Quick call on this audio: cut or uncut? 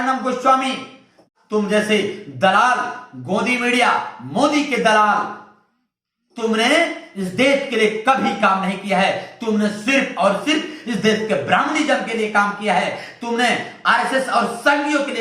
cut